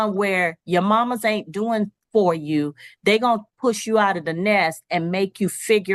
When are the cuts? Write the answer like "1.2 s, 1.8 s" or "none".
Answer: none